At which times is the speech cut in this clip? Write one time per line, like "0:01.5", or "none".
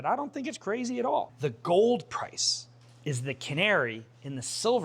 0:01.3